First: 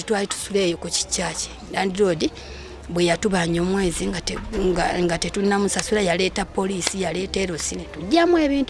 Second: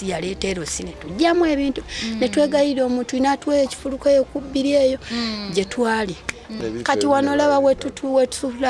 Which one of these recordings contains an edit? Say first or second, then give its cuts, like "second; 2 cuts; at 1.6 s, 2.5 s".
second; 1 cut; at 6.5 s